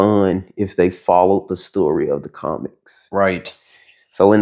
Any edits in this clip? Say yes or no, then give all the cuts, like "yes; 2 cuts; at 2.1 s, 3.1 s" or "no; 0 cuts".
no; 0 cuts